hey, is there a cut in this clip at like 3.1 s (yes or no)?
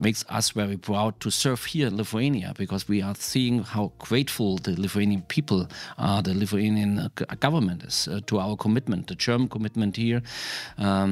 no